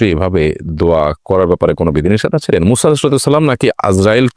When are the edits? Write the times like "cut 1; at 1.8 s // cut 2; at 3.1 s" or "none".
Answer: cut 1; at 2.5 s